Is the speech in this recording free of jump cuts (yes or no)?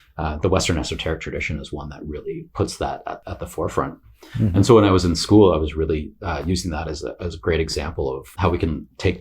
no